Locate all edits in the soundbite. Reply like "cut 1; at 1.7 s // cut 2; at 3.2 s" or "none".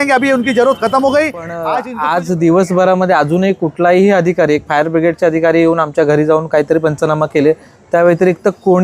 cut 1; at 1.7 s